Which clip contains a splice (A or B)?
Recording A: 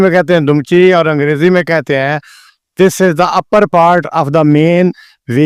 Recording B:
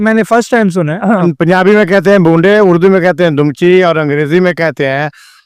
B